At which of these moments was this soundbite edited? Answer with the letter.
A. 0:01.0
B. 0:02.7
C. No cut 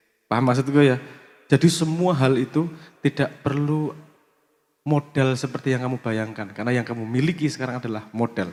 C